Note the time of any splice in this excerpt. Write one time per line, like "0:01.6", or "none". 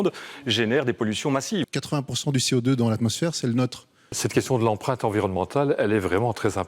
0:01.7
0:04.1